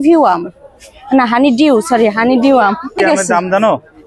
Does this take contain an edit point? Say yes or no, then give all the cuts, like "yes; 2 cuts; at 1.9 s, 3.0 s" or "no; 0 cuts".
yes; 1 cut; at 3.0 s